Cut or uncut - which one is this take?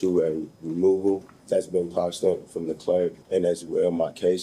cut